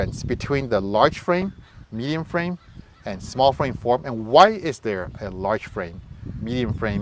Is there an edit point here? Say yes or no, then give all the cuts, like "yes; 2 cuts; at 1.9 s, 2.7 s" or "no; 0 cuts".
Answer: no; 0 cuts